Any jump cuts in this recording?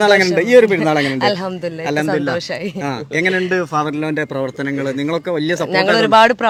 no; 0 cuts

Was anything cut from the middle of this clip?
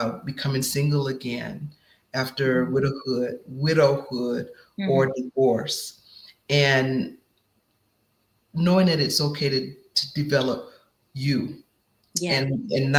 no; 0 cuts

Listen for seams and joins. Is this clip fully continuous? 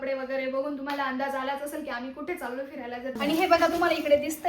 no; 1 cut; at 3.2 s

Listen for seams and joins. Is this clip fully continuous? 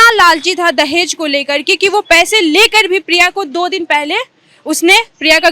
yes; 0 cuts

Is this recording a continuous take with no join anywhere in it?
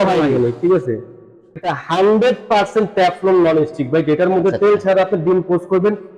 no; 1 cut; at 1.6 s

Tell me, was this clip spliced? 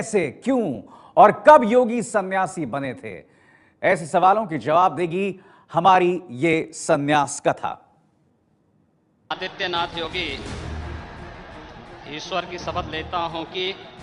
yes; 1 cut; at 8.5 s

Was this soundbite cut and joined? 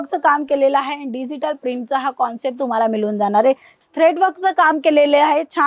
yes; 1 cut; at 3.7 s

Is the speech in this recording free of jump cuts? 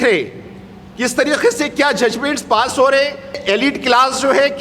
no; 1 cut; at 3.4 s

